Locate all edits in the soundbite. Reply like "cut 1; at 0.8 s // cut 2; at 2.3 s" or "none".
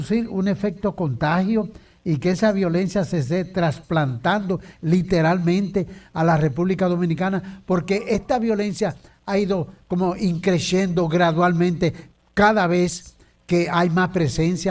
none